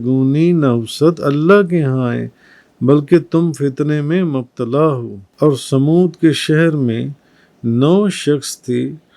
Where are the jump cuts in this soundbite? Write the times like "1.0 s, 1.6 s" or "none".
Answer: 5.3 s